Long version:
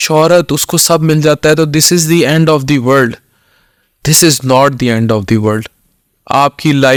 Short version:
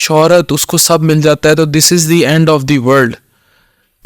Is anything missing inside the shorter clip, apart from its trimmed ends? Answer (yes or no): no